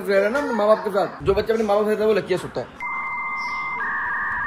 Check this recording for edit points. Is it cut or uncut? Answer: uncut